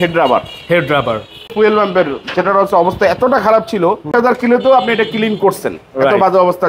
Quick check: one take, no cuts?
no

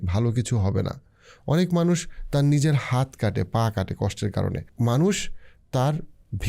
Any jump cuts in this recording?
yes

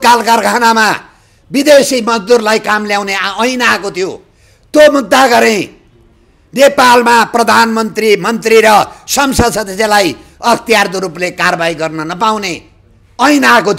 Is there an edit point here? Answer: no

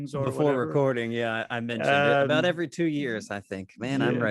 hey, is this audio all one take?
yes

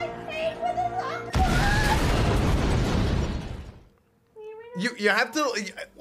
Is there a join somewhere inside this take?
no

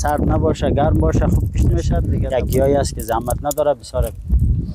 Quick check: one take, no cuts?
no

